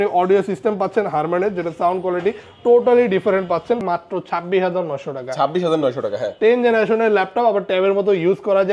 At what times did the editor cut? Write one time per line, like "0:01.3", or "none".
0:03.8